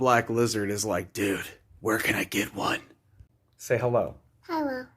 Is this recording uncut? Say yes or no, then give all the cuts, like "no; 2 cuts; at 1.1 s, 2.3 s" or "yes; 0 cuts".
no; 1 cut; at 3.3 s